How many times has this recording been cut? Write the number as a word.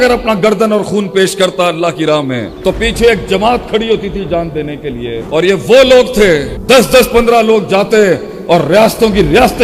zero